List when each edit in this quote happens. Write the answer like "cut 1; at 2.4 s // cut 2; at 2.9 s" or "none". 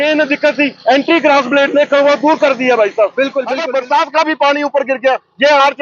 cut 1; at 3.6 s